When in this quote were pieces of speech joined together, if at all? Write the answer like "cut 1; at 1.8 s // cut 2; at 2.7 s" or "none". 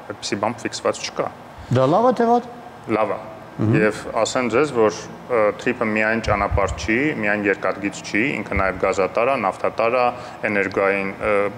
none

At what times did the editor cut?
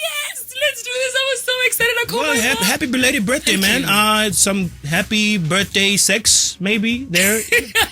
cut 1; at 2.3 s

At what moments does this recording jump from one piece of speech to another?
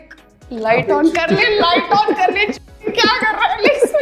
none

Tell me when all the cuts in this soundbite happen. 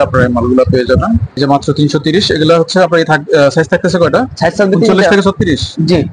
cut 1; at 1.4 s

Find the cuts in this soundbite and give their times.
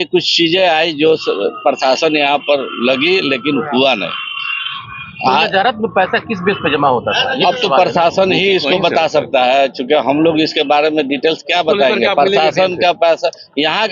none

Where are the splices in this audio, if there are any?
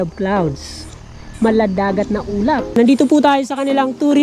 cut 1; at 2.7 s

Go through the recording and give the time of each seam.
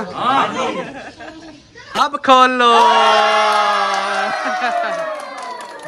none

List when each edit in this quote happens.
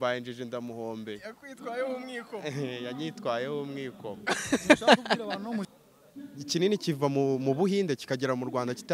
cut 1; at 5.6 s

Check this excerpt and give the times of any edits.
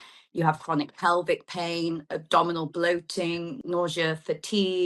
cut 1; at 3.6 s

